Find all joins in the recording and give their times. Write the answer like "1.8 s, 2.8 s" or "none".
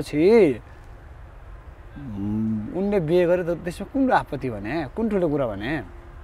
none